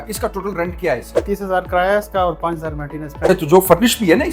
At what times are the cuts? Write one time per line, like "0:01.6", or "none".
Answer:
0:01.2
0:03.3